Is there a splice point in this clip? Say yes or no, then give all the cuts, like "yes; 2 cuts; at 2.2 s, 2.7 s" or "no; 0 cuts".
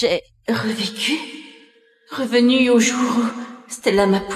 no; 0 cuts